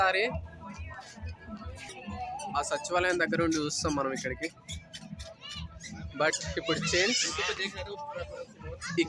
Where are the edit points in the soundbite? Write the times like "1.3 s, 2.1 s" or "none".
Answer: none